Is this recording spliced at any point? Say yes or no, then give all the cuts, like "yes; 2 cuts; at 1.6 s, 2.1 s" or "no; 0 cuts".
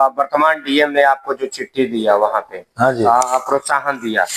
no; 0 cuts